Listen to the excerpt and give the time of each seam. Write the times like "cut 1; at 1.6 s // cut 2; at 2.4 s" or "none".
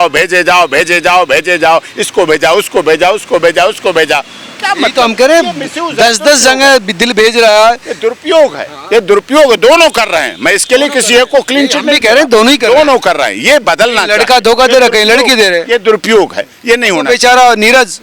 none